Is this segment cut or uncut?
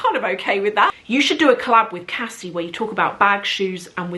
cut